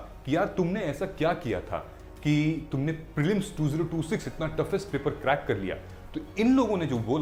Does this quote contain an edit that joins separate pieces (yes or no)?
no